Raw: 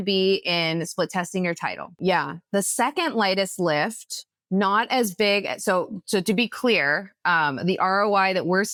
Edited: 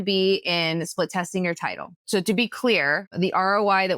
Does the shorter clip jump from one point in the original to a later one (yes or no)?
yes